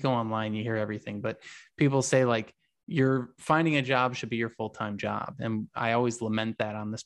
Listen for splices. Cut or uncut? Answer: uncut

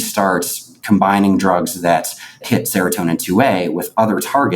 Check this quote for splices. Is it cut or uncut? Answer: cut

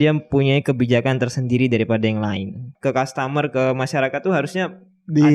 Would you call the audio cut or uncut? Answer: cut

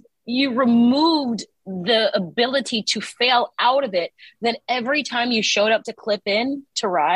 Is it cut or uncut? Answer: uncut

